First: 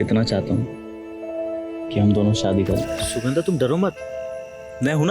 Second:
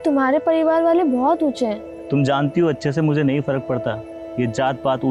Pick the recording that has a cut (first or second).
first